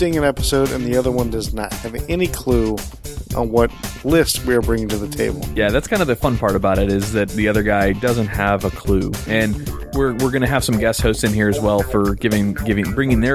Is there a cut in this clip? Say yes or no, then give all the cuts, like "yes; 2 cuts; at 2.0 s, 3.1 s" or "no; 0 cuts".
yes; 1 cut; at 7.3 s